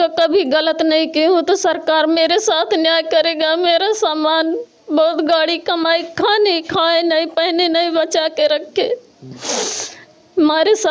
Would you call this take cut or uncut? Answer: uncut